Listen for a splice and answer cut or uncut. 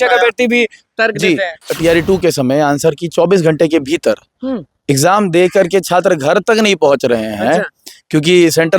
cut